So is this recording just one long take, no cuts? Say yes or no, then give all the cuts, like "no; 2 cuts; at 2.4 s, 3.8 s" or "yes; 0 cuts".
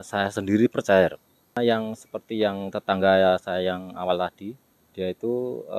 no; 1 cut; at 1.6 s